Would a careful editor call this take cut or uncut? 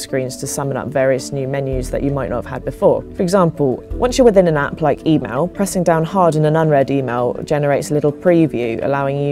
cut